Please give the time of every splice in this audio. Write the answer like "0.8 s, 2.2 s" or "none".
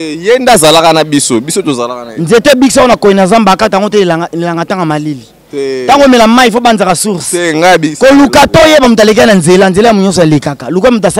none